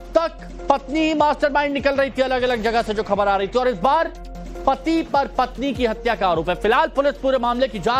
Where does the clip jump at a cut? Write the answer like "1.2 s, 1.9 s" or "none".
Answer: none